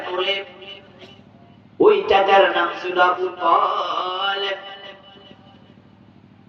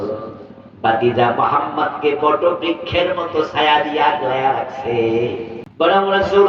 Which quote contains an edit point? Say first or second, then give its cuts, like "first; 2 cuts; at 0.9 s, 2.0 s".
second; 1 cut; at 5.6 s